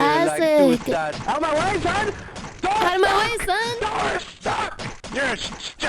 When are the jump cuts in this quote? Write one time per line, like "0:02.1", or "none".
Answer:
0:01.1
0:05.0